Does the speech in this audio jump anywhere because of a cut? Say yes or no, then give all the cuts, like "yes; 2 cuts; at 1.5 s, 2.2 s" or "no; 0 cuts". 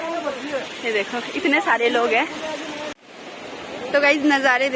yes; 1 cut; at 3.0 s